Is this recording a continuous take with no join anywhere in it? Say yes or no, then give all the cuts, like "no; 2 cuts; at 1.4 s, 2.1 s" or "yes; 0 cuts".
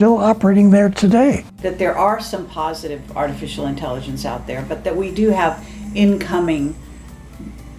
no; 1 cut; at 1.5 s